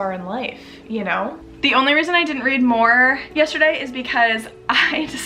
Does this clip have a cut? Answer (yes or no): yes